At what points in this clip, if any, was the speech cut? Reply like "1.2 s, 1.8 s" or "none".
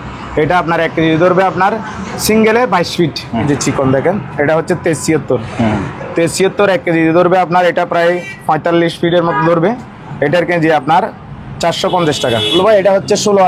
3.4 s, 12.5 s